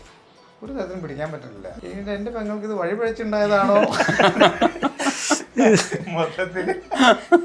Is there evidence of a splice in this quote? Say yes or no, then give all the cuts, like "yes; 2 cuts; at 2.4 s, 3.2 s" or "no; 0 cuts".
yes; 1 cut; at 1.7 s